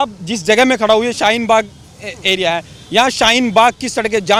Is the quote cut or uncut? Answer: uncut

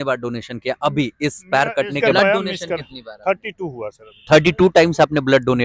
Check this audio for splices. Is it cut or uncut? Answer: cut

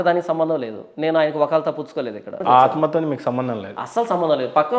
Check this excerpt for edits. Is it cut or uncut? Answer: cut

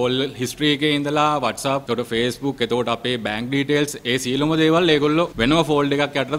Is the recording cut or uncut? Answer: cut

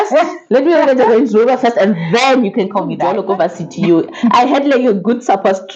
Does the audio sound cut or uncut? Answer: cut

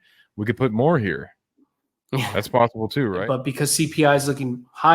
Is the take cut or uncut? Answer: cut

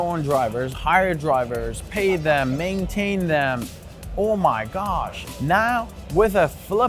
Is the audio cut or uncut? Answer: cut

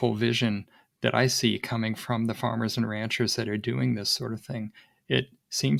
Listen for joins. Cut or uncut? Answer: uncut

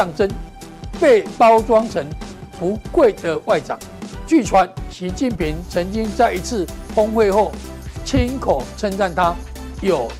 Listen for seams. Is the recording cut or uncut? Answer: uncut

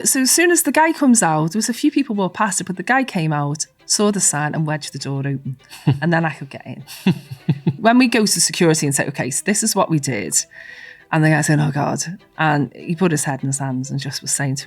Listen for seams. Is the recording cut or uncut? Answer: cut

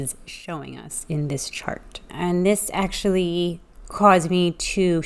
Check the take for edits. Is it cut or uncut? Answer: cut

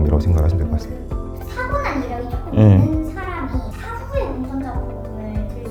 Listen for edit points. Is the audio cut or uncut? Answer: uncut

